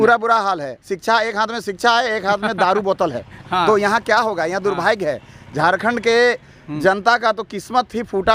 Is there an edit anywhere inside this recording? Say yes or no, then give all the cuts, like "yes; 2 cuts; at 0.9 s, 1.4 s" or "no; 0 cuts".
no; 0 cuts